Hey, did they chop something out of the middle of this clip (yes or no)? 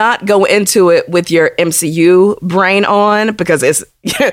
no